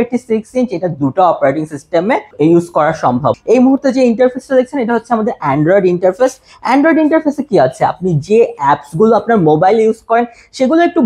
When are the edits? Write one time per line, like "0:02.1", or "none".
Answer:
0:02.3
0:03.4

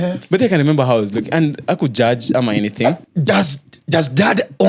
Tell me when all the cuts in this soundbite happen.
0:03.0

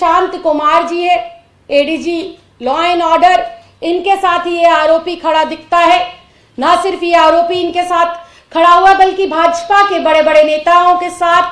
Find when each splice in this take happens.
none

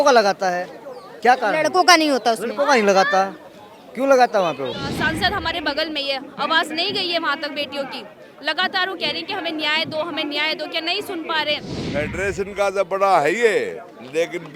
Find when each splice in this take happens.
0:04.9
0:11.8

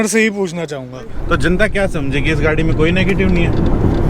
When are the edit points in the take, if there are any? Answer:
0:01.2

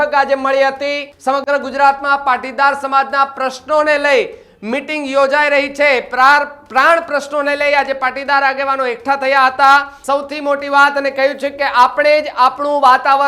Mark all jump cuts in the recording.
0:01.1
0:09.9

